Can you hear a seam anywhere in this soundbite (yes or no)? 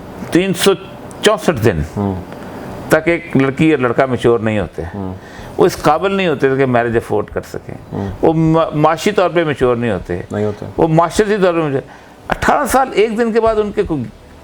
no